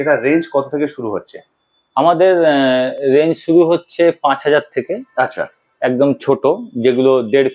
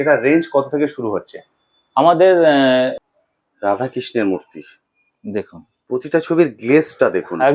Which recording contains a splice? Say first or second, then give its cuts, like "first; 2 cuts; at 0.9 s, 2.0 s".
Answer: second; 1 cut; at 2.9 s